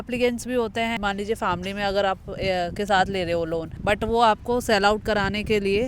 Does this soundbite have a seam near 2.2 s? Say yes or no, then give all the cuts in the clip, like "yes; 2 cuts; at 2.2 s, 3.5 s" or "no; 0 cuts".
no; 2 cuts; at 1.0 s, 3.7 s